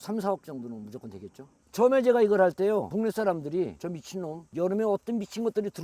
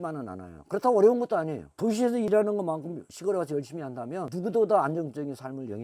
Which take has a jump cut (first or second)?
second